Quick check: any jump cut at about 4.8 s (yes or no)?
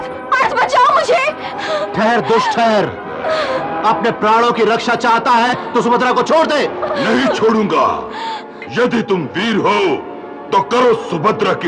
no